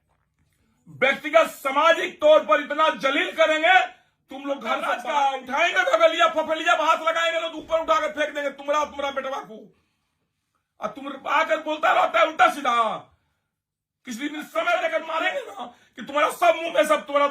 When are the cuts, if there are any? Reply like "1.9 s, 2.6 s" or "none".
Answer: 4.9 s, 15.0 s